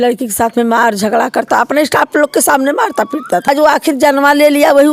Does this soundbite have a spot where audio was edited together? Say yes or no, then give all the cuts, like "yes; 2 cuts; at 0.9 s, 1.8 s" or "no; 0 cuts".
yes; 1 cut; at 3.5 s